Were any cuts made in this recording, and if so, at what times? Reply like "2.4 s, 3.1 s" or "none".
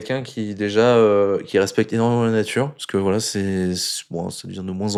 none

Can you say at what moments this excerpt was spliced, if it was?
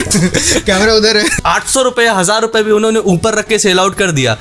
1.4 s

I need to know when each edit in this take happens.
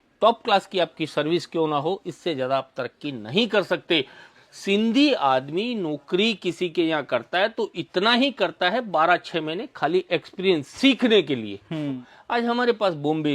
4.3 s, 12.1 s

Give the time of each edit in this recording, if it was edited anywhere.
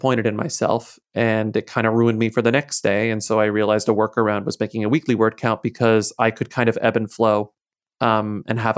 none

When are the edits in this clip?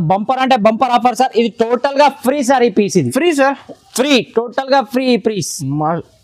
none

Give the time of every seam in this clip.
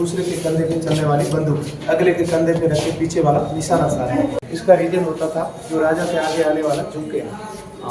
4.3 s

